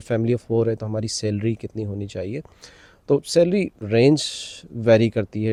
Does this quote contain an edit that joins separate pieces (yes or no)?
no